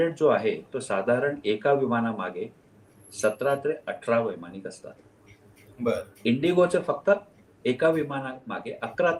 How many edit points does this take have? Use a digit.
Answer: 0